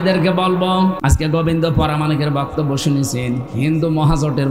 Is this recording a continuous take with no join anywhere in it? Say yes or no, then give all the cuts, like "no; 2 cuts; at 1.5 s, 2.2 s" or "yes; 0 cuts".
no; 1 cut; at 1.0 s